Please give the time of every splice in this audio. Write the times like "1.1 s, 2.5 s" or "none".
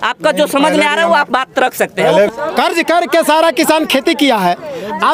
2.3 s